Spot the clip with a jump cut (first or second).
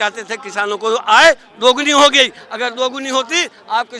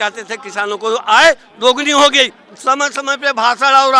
second